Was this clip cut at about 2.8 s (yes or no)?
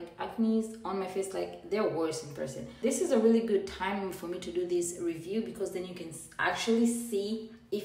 yes